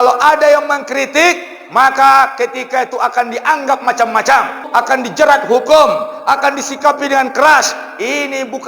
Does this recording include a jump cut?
yes; 1 cut; at 4.6 s

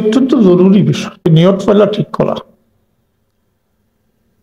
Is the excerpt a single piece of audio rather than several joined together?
no; 1 cut; at 1.3 s

